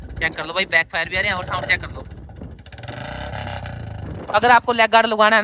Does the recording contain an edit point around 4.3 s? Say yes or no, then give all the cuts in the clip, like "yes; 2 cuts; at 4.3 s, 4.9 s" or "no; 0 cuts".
yes; 1 cut; at 4.3 s